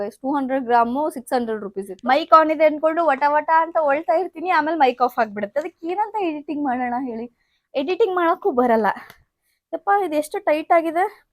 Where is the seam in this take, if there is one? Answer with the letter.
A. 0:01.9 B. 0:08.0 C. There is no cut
A